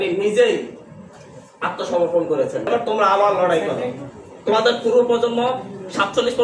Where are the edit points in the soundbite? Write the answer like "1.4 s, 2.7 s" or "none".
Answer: 2.7 s